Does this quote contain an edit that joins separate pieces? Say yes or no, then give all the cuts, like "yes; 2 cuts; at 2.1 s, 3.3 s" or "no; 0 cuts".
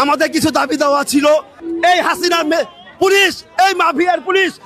yes; 1 cut; at 1.6 s